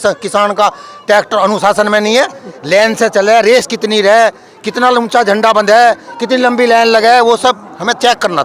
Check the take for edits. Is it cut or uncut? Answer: uncut